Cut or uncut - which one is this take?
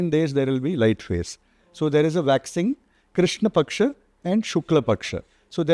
uncut